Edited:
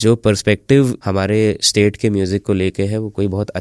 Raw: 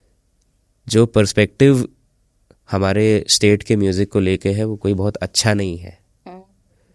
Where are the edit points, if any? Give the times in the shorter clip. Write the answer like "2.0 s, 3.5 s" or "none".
1.0 s